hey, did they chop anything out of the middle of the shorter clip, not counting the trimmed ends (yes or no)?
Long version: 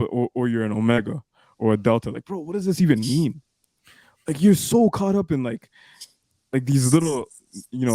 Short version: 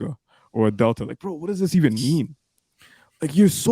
no